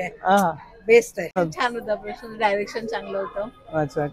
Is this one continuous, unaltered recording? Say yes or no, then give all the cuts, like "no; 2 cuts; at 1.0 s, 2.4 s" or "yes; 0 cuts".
no; 1 cut; at 1.4 s